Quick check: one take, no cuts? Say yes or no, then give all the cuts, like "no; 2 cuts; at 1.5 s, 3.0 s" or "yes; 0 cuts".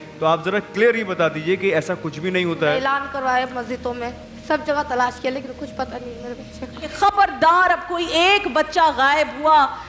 no; 2 cuts; at 2.8 s, 6.9 s